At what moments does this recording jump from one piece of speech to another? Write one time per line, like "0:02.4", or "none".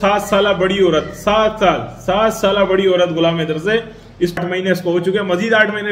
0:04.4